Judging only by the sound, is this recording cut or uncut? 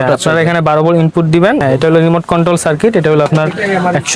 cut